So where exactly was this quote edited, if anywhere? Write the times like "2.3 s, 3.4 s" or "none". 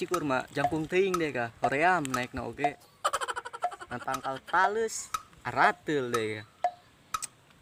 none